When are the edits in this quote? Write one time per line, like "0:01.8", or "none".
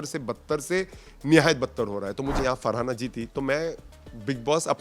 0:02.4